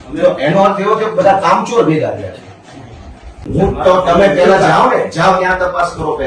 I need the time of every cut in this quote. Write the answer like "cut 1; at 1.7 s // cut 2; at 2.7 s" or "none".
cut 1; at 3.7 s